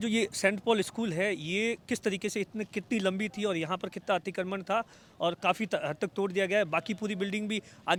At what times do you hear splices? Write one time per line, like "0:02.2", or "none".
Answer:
none